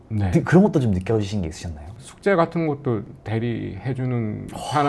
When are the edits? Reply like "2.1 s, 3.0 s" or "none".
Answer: none